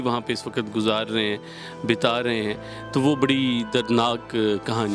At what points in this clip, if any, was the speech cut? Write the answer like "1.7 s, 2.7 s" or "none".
none